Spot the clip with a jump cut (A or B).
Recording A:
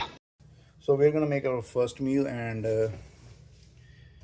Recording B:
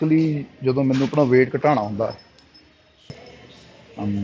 B